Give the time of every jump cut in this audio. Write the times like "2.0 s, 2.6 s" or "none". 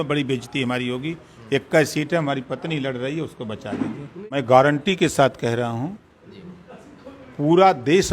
4.3 s